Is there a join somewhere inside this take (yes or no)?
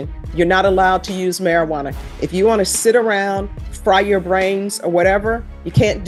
no